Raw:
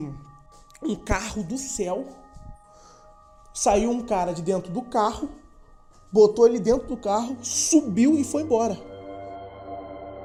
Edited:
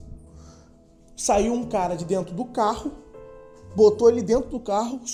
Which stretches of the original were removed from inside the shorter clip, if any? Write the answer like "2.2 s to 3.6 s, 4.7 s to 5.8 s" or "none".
none